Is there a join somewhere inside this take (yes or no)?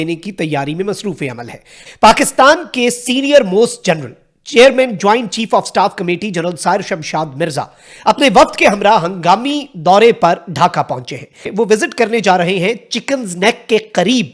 yes